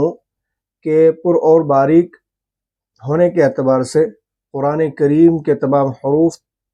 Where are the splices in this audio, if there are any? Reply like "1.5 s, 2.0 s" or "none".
none